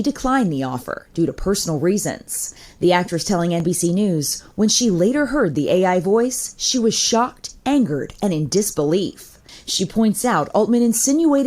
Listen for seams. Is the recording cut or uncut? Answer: uncut